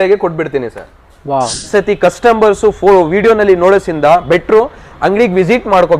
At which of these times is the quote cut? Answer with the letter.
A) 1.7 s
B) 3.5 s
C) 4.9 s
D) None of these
A